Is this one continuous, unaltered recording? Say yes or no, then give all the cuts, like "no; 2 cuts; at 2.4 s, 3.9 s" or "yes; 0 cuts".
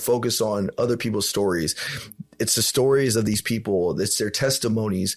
yes; 0 cuts